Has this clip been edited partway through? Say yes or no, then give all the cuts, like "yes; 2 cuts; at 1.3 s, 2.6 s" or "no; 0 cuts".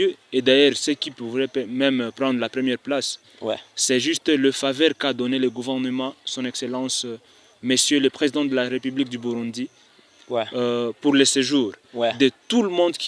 no; 0 cuts